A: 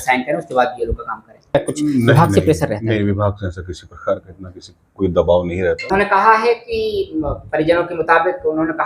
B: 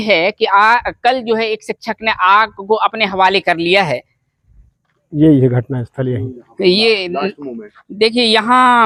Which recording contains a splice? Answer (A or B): A